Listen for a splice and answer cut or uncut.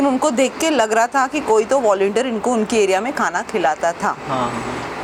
uncut